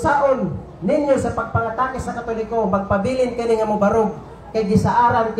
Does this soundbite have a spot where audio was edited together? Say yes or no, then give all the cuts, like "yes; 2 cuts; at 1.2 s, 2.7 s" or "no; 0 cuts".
no; 0 cuts